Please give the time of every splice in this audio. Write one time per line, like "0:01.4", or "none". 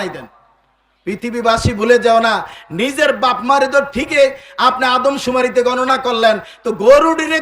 none